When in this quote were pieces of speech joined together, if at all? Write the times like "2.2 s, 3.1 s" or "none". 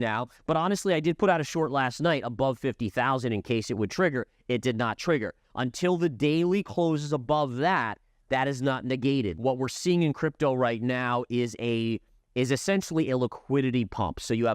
5.4 s, 9.3 s

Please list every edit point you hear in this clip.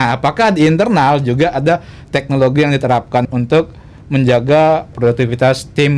3.2 s, 5.0 s

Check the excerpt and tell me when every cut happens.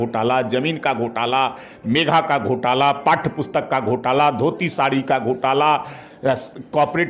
none

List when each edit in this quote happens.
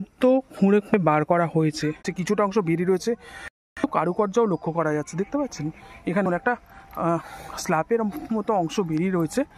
2.1 s

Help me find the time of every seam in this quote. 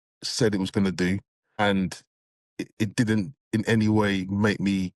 1.6 s

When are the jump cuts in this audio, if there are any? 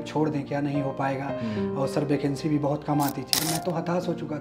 3.3 s

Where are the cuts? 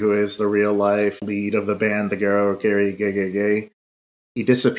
1.2 s

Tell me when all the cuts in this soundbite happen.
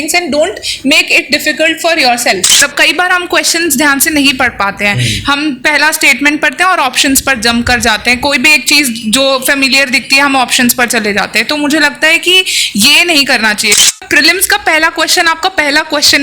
2.7 s, 13.9 s

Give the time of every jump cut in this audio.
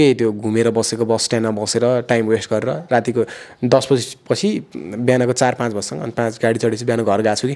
none

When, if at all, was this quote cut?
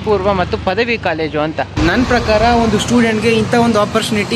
1.7 s

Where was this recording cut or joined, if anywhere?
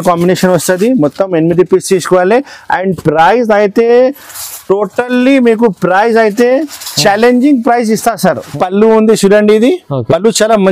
8.5 s

